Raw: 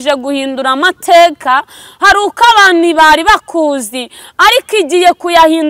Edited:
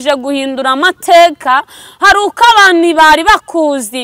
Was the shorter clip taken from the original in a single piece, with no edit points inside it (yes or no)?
yes